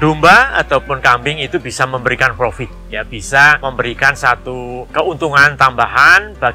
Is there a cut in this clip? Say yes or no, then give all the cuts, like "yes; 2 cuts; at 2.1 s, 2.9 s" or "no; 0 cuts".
yes; 2 cuts; at 3.6 s, 4.8 s